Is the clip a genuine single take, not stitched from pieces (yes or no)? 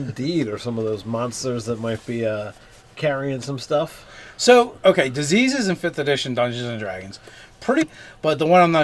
yes